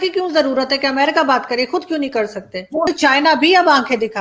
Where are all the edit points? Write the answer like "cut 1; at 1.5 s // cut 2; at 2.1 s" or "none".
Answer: cut 1; at 2.9 s